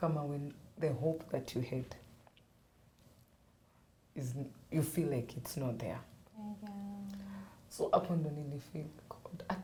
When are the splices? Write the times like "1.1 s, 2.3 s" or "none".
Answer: none